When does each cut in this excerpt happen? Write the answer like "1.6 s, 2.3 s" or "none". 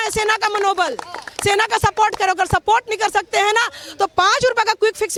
none